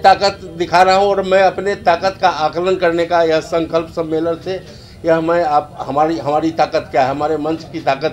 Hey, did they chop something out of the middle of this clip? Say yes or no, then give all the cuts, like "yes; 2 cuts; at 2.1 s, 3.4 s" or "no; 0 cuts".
no; 0 cuts